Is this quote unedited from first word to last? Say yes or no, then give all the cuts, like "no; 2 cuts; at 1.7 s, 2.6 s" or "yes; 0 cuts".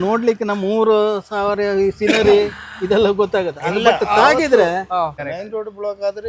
no; 1 cut; at 5.1 s